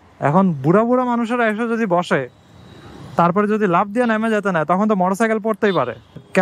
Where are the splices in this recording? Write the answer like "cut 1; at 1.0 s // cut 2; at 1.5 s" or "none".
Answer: none